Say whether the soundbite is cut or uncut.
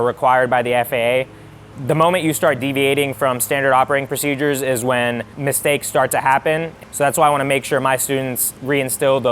cut